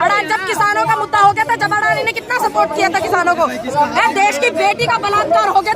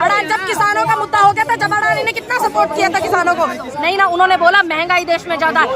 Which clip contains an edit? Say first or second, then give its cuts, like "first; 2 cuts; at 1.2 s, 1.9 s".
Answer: second; 1 cut; at 3.6 s